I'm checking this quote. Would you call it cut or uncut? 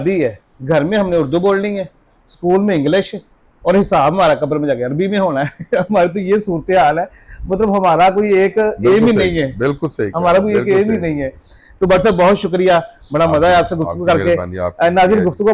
uncut